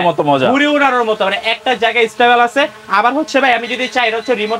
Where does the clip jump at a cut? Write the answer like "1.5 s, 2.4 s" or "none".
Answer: none